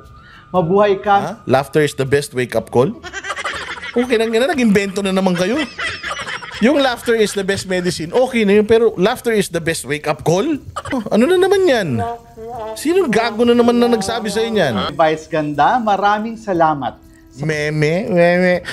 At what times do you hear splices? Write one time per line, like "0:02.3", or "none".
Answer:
0:11.0
0:14.9